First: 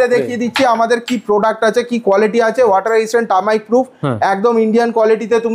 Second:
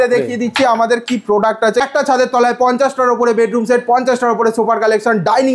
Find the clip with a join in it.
second; 1 cut; at 1.9 s

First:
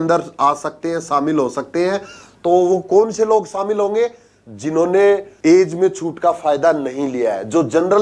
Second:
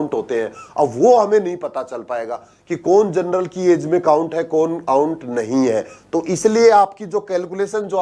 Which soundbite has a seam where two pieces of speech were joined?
first; 1 cut; at 5.3 s

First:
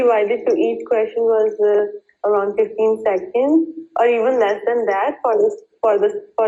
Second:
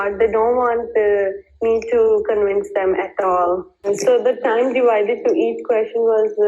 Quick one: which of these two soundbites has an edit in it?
second; 1 cut; at 3.9 s

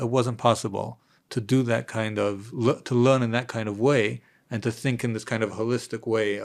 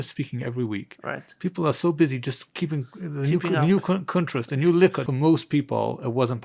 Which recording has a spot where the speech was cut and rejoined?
second; 1 cut; at 5.1 s

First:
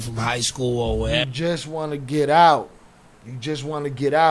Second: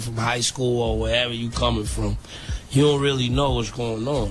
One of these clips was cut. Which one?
second; 1 cut; at 1.2 s

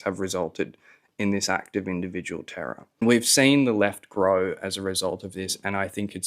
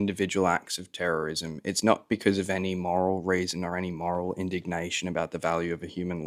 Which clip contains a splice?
first; 1 cut; at 3.0 s

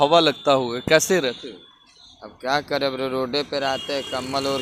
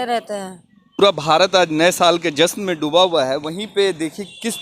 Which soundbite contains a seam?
second; 1 cut; at 1.0 s

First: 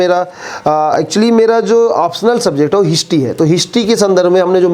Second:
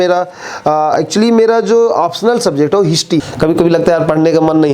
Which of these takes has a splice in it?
second; 1 cut; at 3.3 s

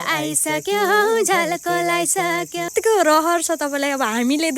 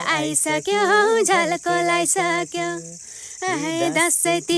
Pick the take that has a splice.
first; 1 cut; at 2.7 s

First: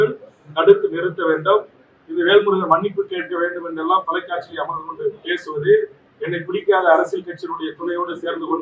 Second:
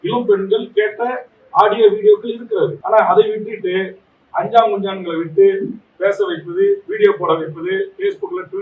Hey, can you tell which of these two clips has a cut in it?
second; 1 cut; at 2.8 s

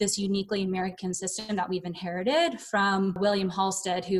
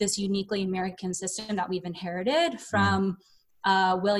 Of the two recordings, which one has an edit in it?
first; 1 cut; at 3.2 s

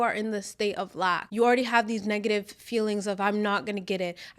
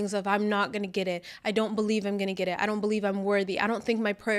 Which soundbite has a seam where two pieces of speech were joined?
first; 1 cut; at 1.2 s

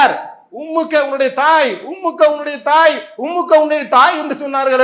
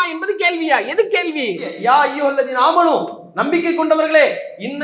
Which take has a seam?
second; 1 cut; at 1.8 s

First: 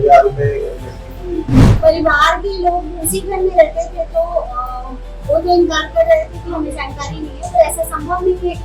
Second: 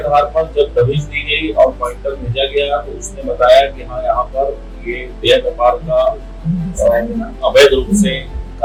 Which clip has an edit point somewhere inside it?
first; 1 cut; at 1.8 s

